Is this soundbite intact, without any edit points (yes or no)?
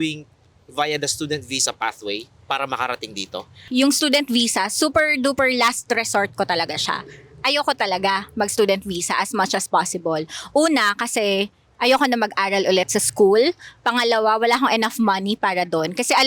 no